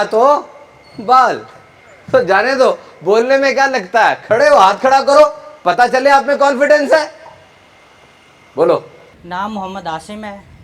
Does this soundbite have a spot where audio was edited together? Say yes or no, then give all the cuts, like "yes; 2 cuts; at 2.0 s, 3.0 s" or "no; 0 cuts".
no; 0 cuts